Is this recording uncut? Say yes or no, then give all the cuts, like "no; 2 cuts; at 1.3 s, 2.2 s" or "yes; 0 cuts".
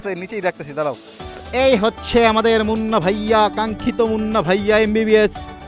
no; 1 cut; at 1.5 s